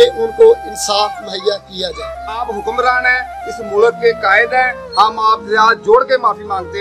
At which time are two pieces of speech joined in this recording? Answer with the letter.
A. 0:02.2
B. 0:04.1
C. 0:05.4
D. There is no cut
A